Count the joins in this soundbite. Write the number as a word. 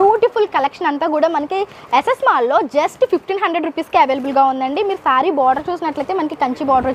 zero